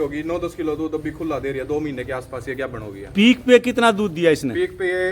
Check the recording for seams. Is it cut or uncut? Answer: uncut